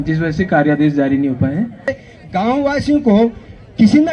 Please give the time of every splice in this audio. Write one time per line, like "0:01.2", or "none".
0:02.0